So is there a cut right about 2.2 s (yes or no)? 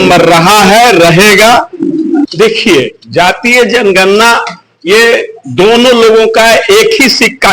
yes